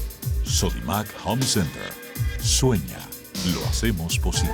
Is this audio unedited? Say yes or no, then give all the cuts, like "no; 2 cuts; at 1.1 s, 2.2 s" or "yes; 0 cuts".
yes; 0 cuts